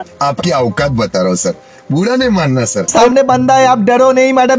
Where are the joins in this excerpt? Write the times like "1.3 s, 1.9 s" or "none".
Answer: 3.1 s